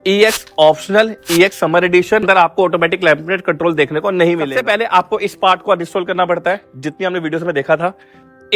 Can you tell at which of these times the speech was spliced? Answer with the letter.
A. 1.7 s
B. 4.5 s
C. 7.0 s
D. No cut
B